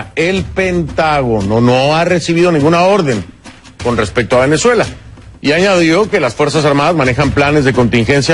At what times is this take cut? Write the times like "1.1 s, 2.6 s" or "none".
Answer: 2.0 s